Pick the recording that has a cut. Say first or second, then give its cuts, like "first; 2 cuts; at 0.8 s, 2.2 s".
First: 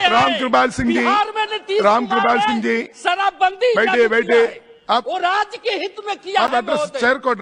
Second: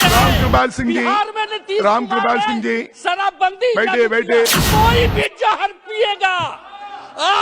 second; 1 cut; at 4.6 s